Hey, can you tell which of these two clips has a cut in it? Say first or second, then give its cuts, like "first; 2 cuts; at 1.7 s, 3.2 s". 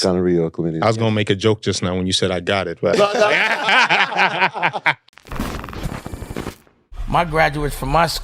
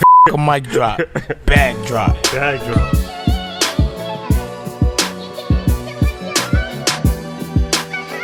first; 1 cut; at 5.1 s